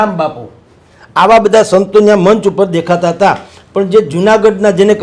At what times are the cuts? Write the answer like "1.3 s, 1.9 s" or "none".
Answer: none